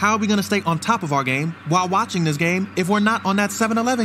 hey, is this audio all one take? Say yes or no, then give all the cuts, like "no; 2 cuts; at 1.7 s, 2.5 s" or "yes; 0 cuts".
yes; 0 cuts